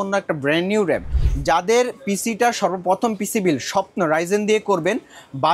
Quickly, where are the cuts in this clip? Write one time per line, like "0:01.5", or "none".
0:01.1